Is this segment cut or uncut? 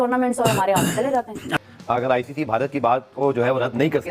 cut